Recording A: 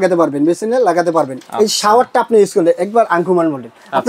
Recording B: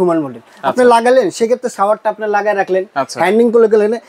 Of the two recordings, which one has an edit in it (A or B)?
A